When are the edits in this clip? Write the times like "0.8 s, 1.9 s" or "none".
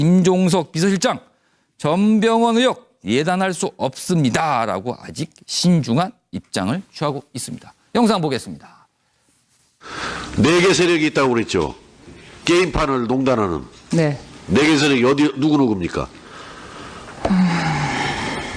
11.4 s